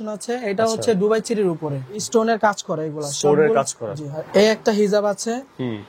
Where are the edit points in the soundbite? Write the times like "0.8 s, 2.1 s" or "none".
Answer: 2.0 s, 4.2 s